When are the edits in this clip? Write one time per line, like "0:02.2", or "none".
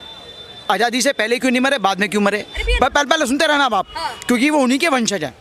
none

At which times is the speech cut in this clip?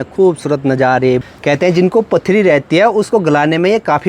0:01.3

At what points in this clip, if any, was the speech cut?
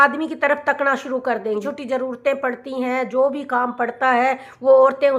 0:01.7

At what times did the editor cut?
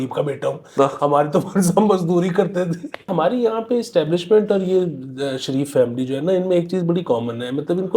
0:03.1

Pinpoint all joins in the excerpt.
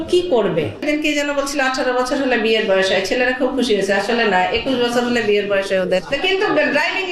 0:00.8
0:06.1

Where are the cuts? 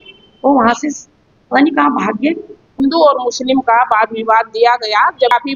0:02.7

